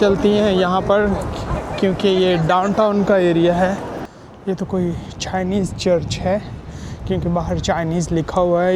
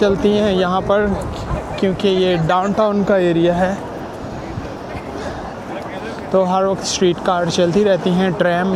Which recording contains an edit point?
first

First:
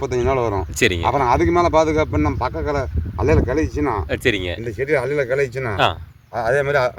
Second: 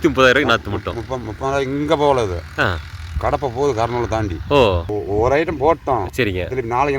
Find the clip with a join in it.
second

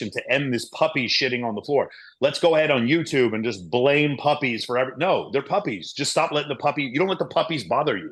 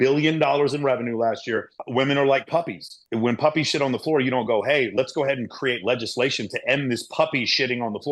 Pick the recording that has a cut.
second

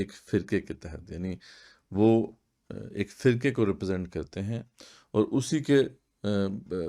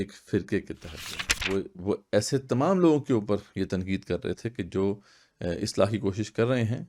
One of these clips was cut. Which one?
second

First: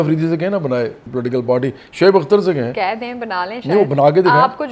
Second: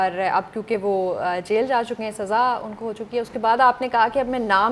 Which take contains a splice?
first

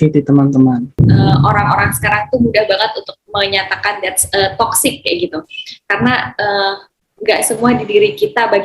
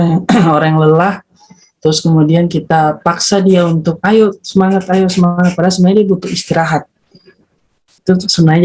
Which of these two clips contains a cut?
first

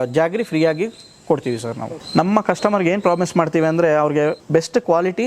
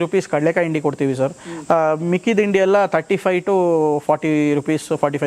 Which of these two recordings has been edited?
first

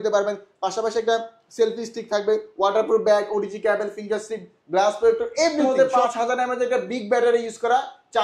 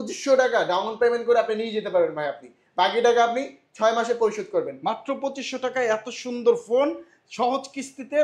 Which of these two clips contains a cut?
first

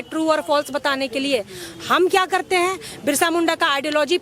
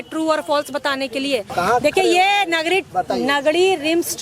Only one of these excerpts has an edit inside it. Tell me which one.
second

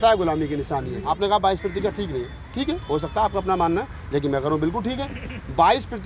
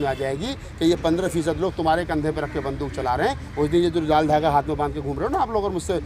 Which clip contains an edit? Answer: first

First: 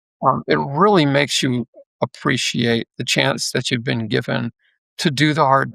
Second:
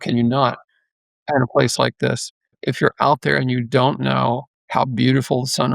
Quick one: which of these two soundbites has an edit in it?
second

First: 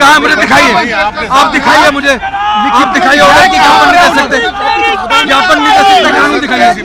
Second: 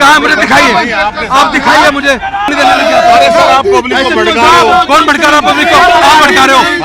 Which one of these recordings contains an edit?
second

